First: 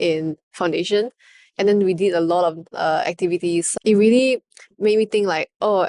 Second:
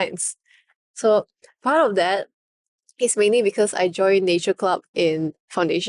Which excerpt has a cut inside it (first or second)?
first